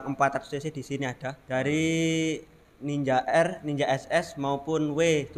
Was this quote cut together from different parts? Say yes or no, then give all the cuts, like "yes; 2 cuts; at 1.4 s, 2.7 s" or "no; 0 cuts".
yes; 1 cut; at 1.3 s